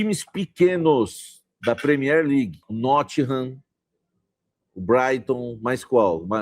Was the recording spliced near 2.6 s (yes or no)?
yes